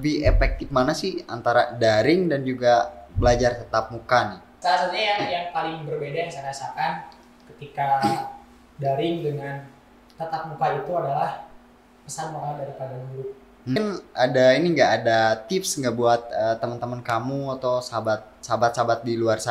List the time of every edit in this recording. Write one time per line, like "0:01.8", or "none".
0:04.5
0:13.8